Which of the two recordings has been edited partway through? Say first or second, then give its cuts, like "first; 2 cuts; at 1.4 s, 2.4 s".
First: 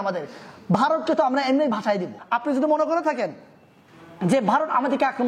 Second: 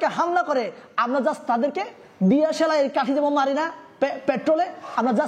first; 1 cut; at 2.1 s